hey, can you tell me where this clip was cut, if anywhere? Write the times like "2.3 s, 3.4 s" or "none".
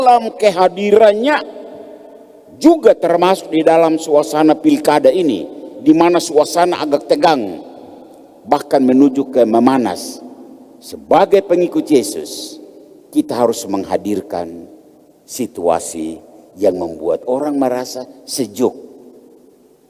none